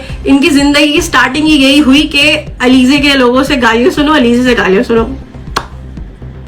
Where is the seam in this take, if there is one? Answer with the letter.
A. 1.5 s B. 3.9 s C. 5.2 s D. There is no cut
D